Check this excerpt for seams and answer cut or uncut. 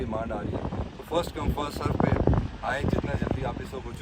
uncut